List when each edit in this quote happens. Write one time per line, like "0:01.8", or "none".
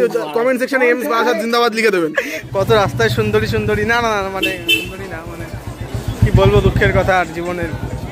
0:02.4